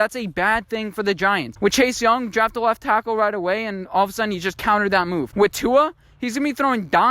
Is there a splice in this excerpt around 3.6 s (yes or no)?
no